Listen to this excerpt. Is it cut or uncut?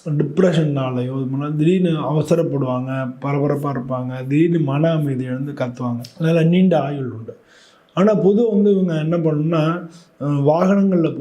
cut